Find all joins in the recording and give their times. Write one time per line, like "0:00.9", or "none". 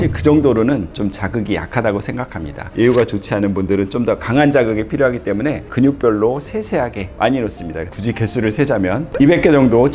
0:02.7
0:05.7
0:07.9